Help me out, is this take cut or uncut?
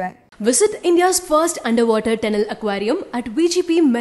uncut